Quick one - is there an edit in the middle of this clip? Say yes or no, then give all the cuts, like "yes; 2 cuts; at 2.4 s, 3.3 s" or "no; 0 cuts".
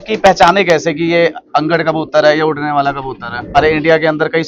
yes; 1 cut; at 3.6 s